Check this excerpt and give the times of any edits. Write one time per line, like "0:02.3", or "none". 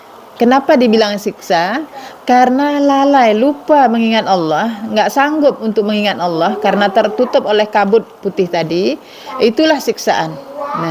none